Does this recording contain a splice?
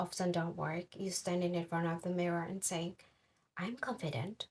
no; 0 cuts

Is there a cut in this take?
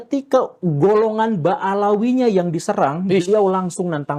no; 0 cuts

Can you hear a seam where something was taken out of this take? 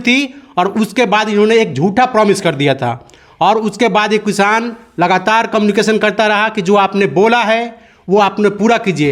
no; 0 cuts

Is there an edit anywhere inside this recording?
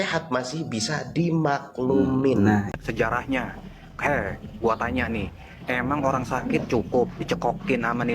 yes; 1 cut; at 2.8 s

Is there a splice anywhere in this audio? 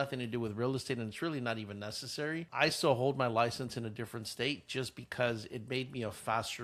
no; 0 cuts

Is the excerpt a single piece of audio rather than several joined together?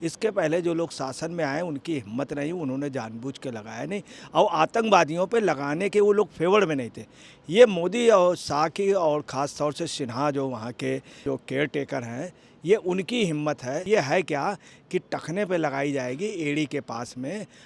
no; 2 cuts; at 11.2 s, 13.8 s

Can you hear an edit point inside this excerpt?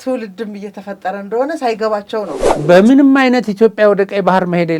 yes; 1 cut; at 2.5 s

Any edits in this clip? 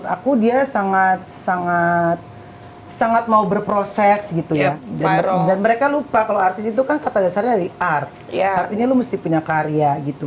yes; 1 cut; at 4.9 s

